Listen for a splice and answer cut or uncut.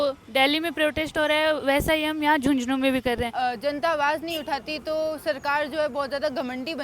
cut